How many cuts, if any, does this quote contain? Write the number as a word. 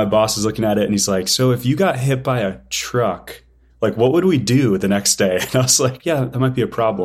one